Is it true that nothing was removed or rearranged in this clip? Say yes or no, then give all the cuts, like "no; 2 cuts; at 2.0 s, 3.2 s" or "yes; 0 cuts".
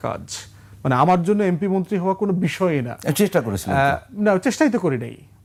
yes; 0 cuts